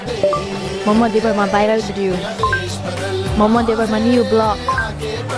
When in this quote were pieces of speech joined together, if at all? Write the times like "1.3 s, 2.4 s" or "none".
none